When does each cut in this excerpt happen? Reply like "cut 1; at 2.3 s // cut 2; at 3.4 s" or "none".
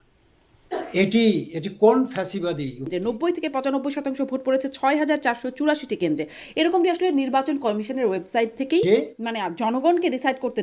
cut 1; at 2.9 s // cut 2; at 8.8 s